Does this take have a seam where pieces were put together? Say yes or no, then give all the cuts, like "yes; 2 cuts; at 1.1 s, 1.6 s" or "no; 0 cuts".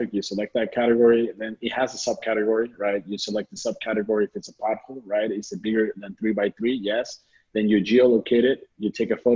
no; 0 cuts